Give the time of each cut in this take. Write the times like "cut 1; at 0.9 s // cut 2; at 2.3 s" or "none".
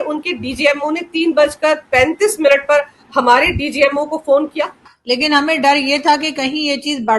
cut 1; at 4.9 s